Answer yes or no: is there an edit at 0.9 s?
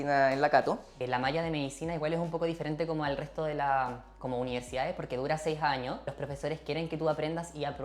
yes